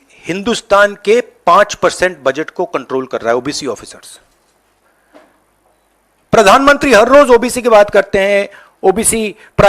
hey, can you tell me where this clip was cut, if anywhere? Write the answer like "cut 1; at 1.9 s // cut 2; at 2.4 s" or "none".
cut 1; at 4.8 s